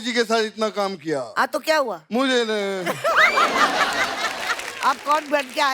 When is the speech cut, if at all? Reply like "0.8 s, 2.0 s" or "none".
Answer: 4.6 s